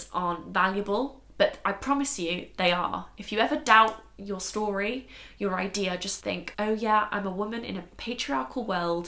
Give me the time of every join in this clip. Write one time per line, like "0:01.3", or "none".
0:06.2